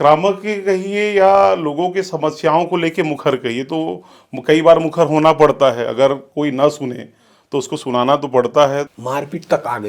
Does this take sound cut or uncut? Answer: cut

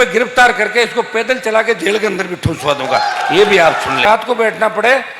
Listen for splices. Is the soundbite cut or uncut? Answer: cut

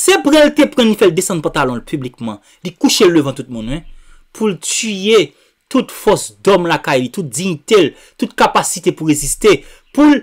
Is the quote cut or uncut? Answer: uncut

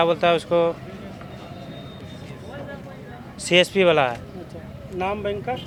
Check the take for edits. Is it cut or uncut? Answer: uncut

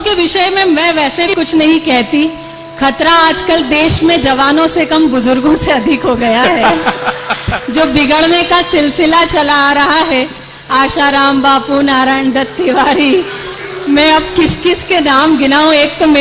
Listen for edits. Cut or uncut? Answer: cut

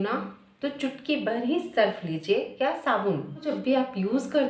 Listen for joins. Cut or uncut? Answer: cut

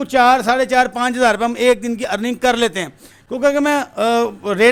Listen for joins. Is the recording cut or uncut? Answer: uncut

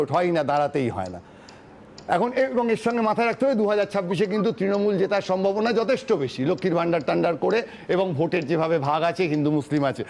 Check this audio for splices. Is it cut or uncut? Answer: uncut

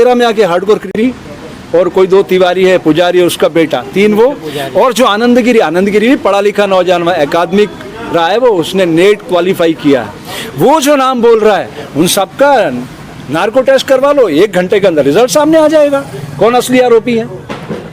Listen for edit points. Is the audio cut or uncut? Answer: cut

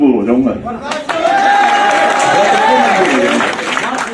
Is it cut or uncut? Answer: uncut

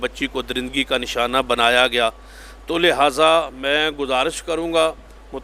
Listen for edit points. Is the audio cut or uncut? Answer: uncut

